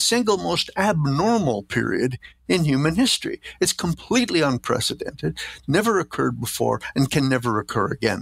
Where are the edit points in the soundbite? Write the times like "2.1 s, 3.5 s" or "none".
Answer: none

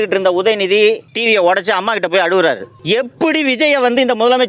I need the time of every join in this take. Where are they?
1.1 s, 2.7 s

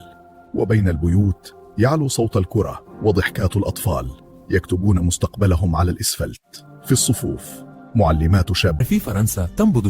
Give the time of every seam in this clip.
8.8 s

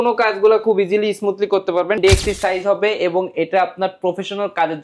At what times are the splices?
2.0 s

